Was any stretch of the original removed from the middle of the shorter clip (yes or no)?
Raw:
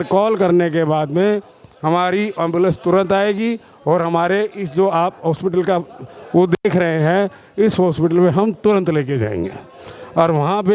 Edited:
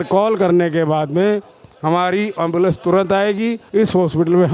yes